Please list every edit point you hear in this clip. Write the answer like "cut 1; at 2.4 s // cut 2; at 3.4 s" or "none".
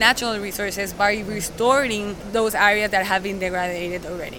cut 1; at 0.9 s // cut 2; at 2.2 s